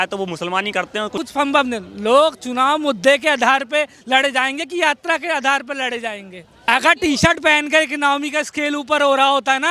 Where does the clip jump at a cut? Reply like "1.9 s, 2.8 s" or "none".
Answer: 1.2 s, 6.5 s